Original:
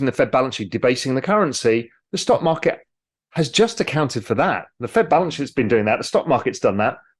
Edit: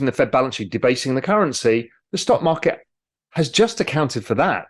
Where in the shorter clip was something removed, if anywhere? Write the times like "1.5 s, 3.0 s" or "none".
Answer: none